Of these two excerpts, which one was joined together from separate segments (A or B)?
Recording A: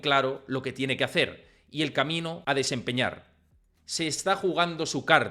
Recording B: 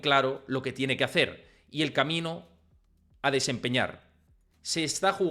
A